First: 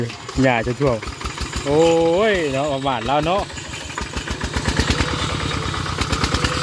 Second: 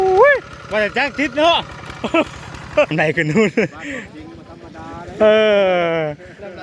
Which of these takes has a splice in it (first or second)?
second